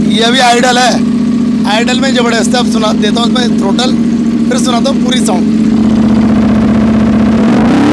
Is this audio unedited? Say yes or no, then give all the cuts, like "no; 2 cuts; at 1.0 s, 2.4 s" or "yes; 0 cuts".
yes; 0 cuts